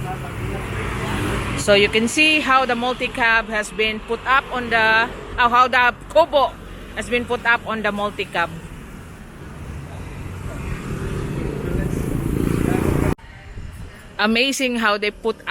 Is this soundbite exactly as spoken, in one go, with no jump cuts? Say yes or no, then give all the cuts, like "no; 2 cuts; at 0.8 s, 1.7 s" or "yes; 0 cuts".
yes; 0 cuts